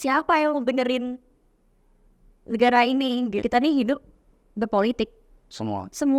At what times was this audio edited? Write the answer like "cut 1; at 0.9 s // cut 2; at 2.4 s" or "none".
cut 1; at 3.4 s